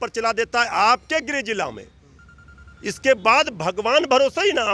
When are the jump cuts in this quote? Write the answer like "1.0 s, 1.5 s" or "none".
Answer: none